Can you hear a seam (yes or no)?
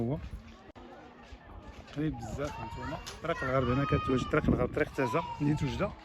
no